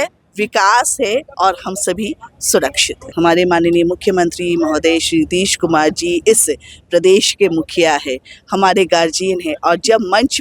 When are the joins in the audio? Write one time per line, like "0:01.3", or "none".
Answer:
0:03.0